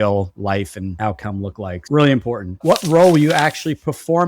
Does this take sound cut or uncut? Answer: uncut